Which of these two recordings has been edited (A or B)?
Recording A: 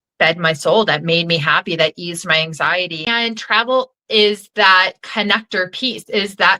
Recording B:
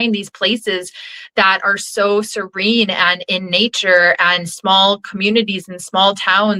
A